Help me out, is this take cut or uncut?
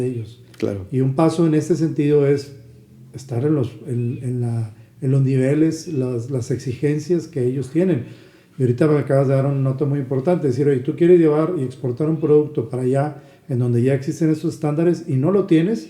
uncut